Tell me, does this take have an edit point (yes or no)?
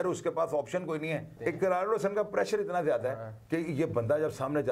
yes